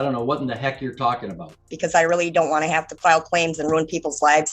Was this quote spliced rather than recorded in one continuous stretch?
yes; 1 cut; at 1.7 s

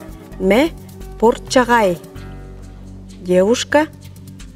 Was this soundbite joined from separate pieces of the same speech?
no; 0 cuts

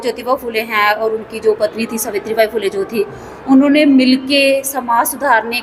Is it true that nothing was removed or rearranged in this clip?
yes; 0 cuts

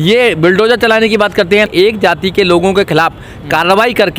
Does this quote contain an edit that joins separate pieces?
yes; 1 cut; at 1.7 s

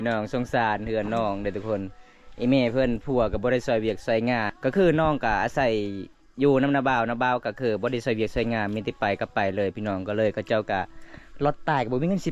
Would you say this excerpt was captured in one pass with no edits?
no; 1 cut; at 4.5 s

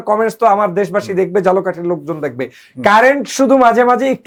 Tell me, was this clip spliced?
no; 0 cuts

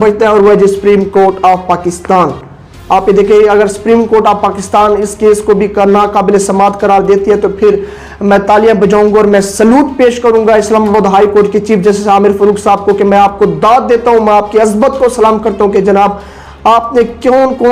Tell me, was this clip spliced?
no; 0 cuts

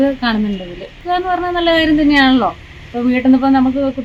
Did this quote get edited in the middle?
no; 0 cuts

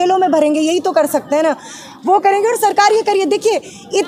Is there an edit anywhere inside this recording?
no; 0 cuts

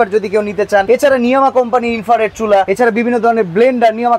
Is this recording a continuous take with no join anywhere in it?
no; 2 cuts; at 0.9 s, 2.7 s

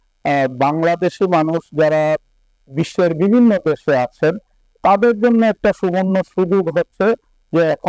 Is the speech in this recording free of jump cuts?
yes; 0 cuts

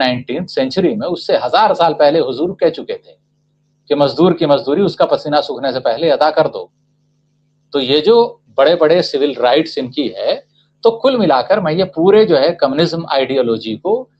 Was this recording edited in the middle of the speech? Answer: no; 0 cuts

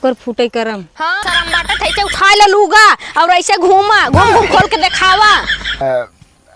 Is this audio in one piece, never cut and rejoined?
no; 2 cuts; at 1.2 s, 5.8 s

